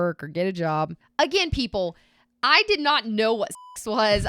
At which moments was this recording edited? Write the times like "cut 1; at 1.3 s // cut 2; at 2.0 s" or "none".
cut 1; at 1.0 s